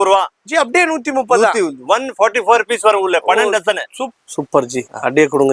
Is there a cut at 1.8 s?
no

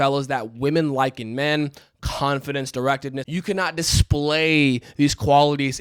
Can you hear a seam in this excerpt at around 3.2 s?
yes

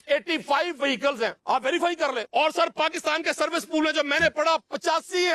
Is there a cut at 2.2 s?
yes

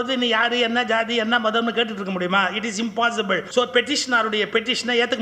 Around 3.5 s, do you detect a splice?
yes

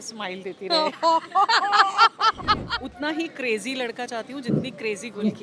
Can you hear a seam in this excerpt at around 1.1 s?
no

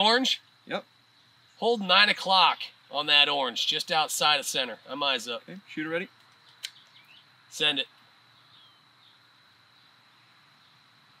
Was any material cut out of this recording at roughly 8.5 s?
no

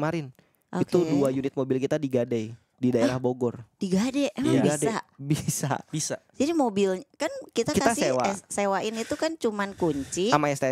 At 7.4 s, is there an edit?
no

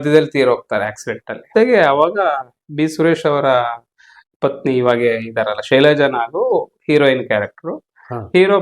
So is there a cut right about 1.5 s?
yes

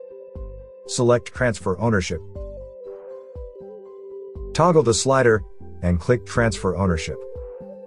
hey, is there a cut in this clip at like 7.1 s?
yes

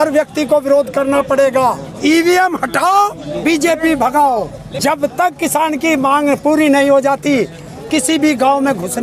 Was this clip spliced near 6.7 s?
no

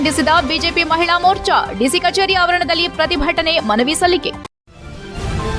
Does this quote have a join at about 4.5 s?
yes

